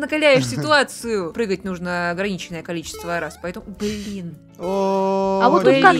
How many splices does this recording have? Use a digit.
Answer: 1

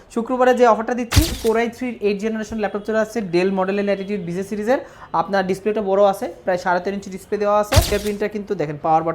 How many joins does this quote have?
2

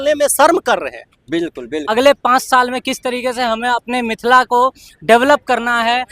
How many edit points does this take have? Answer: 1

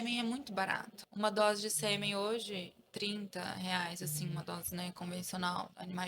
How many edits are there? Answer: 1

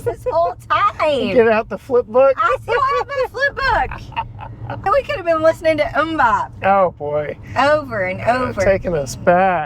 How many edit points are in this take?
2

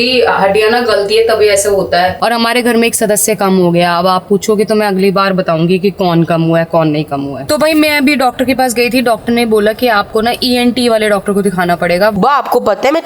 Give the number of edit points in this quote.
3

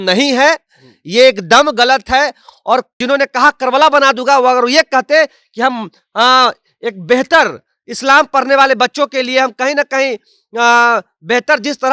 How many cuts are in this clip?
1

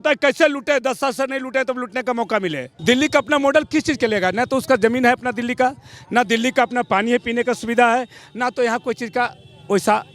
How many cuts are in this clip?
1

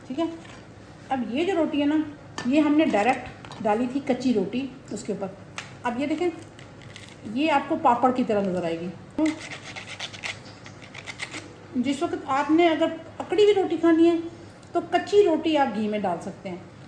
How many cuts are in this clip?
2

